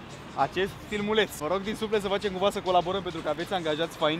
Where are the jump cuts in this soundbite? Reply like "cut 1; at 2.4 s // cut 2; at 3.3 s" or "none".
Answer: none